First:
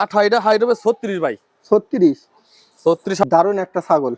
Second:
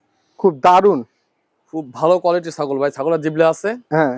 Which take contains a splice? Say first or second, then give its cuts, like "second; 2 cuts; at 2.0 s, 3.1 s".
first; 1 cut; at 3.2 s